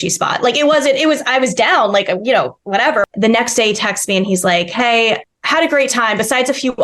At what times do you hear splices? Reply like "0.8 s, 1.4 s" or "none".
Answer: 3.1 s, 5.3 s